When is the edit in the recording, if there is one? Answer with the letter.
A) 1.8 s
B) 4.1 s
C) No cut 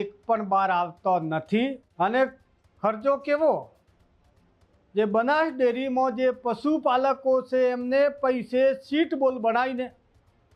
A